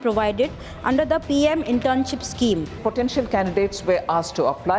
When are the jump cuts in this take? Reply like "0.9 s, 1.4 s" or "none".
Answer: 2.8 s